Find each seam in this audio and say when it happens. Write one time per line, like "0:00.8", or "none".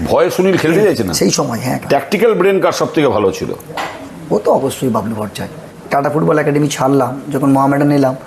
0:01.8
0:05.7